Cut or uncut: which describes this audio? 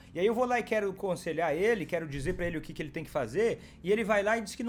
uncut